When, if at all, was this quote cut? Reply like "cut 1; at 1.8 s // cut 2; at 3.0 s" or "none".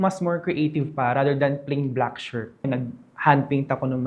cut 1; at 2.7 s

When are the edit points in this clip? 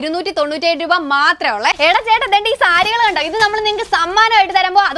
cut 1; at 1.8 s

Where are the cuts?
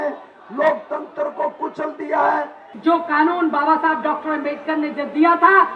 cut 1; at 2.7 s

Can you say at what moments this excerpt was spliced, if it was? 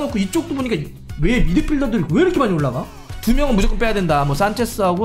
cut 1; at 3.1 s

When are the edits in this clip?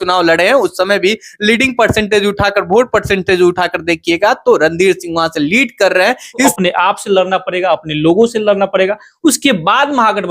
cut 1; at 6.5 s

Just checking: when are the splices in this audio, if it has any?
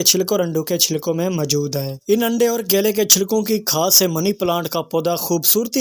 cut 1; at 1.9 s

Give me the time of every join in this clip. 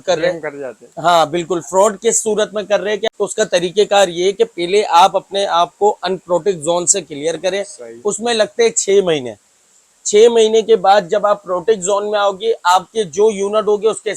cut 1; at 3.0 s

